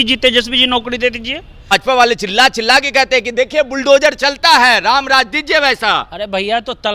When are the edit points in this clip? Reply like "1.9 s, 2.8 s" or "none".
1.6 s